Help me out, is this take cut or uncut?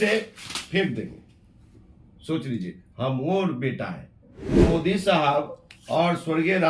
cut